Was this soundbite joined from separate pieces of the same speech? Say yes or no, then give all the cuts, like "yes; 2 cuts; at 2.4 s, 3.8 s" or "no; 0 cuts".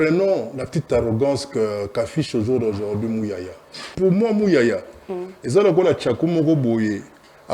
yes; 1 cut; at 3.9 s